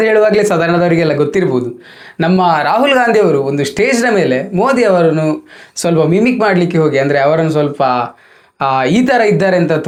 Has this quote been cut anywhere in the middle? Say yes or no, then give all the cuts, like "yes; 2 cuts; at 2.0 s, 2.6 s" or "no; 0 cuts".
no; 0 cuts